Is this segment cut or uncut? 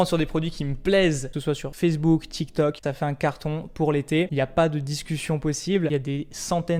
cut